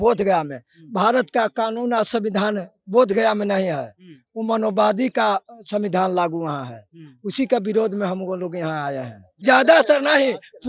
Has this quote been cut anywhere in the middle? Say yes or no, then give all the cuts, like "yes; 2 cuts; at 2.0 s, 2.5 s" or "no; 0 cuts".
yes; 1 cut; at 9.4 s